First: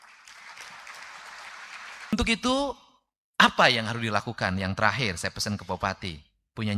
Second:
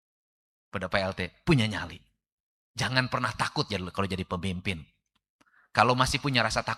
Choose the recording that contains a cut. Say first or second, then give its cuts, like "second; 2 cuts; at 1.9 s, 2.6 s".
first; 1 cut; at 2.1 s